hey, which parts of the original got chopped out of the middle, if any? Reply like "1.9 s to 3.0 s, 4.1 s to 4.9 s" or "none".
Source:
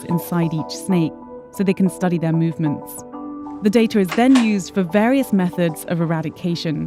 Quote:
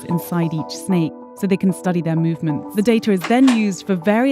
1.2 s to 1.4 s, 2.8 s to 3.5 s